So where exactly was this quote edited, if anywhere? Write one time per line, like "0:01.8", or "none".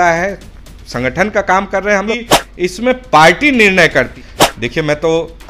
0:02.2
0:04.2